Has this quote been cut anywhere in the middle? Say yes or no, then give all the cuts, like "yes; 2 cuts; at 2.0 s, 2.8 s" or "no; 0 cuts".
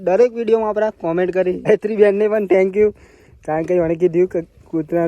yes; 1 cut; at 1.7 s